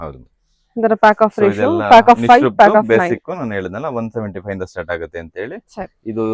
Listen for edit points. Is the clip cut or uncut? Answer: uncut